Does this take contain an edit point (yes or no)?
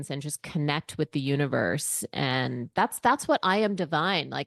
no